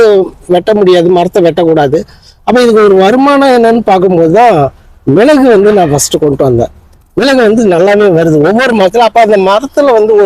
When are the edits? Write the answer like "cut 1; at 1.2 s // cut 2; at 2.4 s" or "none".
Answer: none

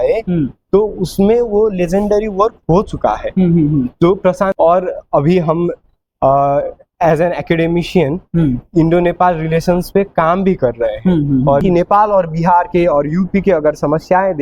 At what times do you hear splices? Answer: cut 1; at 4.5 s // cut 2; at 11.6 s

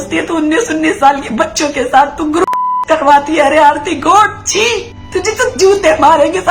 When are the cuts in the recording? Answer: cut 1; at 5.0 s

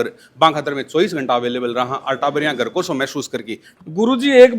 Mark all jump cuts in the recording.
cut 1; at 3.6 s

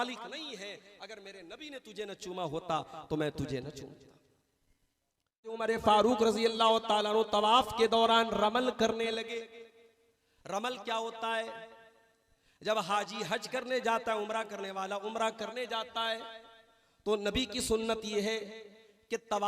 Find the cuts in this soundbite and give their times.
cut 1; at 5.6 s

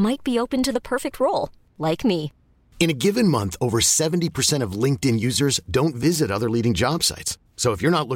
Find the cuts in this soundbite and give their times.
none

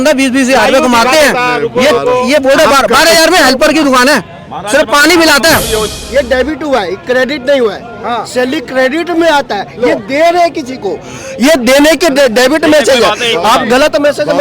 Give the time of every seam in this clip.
cut 1; at 5.9 s

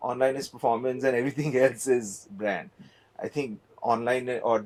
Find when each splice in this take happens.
none

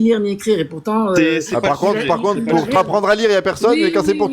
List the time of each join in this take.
cut 1; at 2.8 s

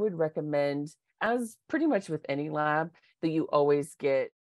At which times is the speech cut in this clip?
none

